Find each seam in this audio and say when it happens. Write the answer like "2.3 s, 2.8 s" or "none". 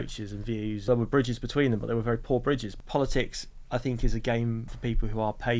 0.8 s, 2.7 s, 4.7 s